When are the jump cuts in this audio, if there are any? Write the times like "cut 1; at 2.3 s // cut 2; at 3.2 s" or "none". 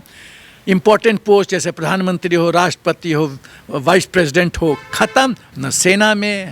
cut 1; at 5.5 s